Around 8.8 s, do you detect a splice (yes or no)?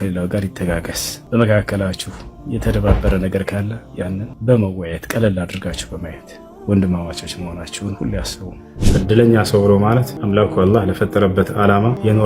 yes